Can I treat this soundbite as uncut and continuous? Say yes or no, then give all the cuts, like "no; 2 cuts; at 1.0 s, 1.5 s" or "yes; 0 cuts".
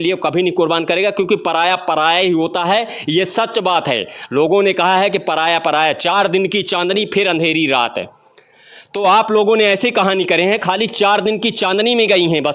yes; 0 cuts